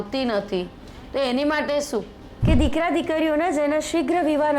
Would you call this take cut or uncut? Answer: cut